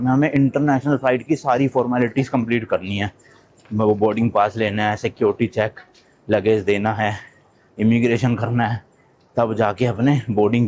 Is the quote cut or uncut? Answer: uncut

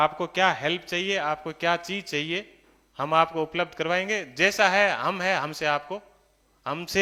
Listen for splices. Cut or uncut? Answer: uncut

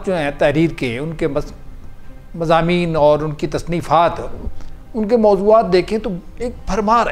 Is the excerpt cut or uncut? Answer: uncut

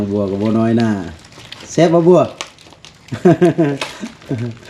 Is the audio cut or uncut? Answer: uncut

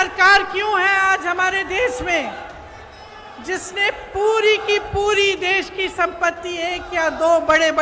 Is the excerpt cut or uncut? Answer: uncut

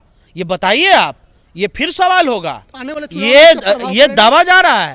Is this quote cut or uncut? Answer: uncut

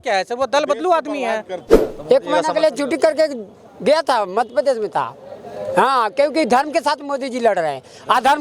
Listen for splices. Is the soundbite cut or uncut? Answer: cut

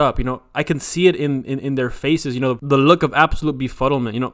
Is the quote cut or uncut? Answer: cut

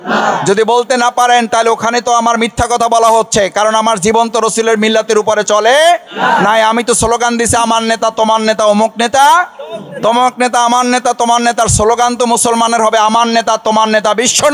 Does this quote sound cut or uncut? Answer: uncut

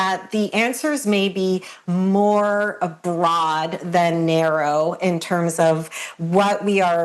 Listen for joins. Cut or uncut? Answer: uncut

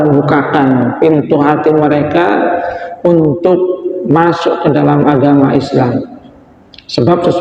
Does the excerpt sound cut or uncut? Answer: uncut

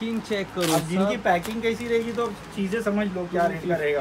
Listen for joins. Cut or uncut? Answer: uncut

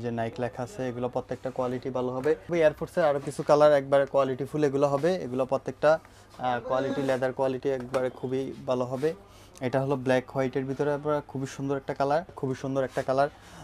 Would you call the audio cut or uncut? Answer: cut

